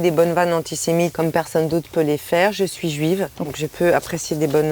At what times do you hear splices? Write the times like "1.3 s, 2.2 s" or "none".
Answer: 1.1 s, 3.6 s